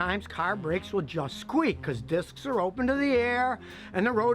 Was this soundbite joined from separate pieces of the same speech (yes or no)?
no